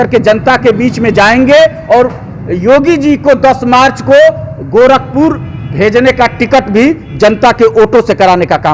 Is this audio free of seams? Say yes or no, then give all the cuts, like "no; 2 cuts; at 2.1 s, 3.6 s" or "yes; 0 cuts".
yes; 0 cuts